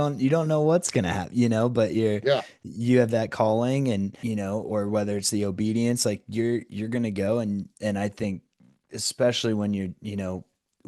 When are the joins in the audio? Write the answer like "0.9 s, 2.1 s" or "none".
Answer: 4.2 s, 7.7 s